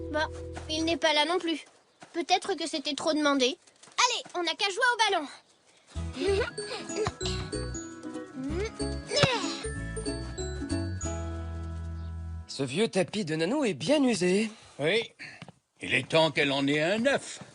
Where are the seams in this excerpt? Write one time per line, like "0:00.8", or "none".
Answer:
0:12.4

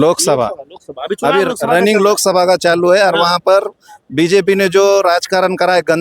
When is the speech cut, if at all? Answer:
none

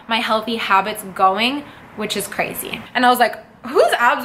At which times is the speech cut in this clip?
0:02.8

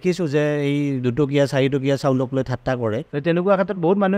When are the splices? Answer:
0:03.1

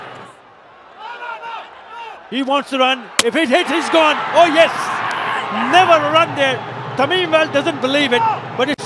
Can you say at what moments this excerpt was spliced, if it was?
none

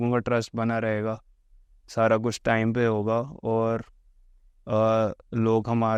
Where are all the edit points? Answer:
none

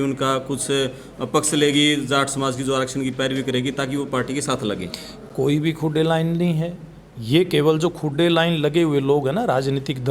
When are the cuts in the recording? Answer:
none

